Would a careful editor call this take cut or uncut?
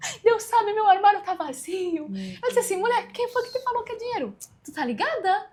uncut